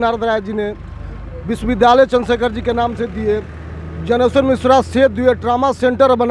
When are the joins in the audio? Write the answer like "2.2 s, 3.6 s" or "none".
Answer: none